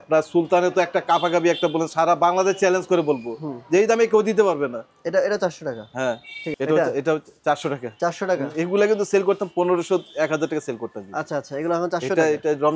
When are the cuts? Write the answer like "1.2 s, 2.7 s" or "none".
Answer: 6.6 s